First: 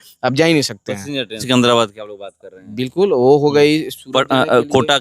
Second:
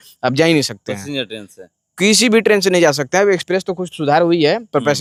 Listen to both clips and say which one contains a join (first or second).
first